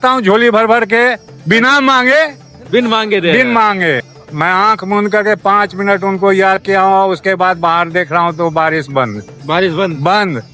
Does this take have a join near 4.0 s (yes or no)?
yes